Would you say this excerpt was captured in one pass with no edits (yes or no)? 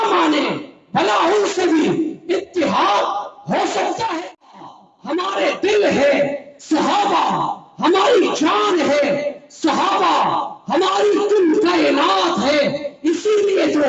no